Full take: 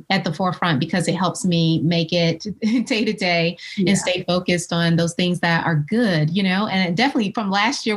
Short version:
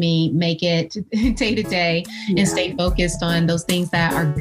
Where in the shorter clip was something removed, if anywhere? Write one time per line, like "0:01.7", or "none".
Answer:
none